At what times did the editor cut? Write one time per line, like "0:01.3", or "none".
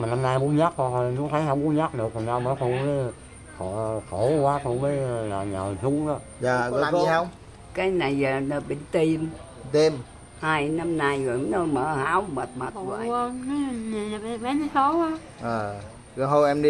0:07.1
0:12.8